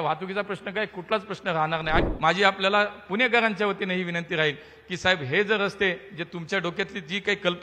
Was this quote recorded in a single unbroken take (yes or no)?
no